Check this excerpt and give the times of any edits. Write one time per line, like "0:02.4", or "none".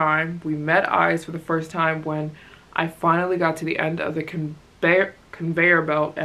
none